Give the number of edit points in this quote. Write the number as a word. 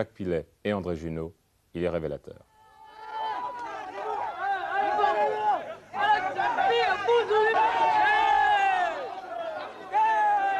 one